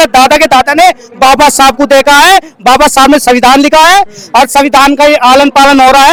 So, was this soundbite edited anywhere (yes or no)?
no